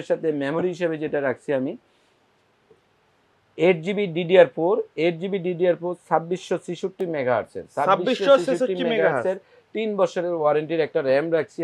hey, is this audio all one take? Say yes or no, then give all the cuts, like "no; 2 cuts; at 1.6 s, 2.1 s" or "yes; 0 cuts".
yes; 0 cuts